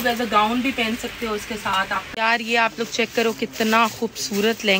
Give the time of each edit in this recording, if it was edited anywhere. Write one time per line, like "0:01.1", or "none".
0:02.1